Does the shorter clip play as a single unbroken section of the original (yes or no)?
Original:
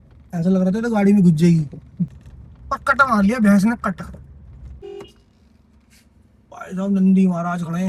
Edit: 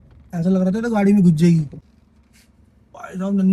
no